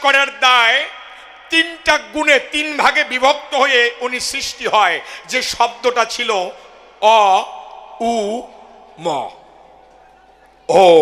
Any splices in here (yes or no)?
no